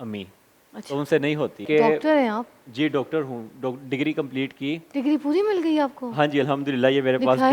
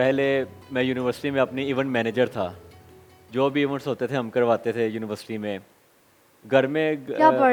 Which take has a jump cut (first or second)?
first